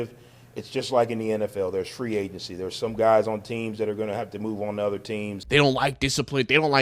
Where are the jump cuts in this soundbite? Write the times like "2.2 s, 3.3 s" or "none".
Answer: 5.4 s